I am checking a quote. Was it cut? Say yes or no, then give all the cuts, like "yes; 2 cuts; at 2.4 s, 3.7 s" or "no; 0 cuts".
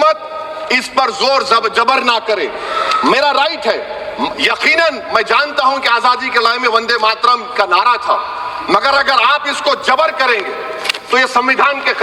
no; 0 cuts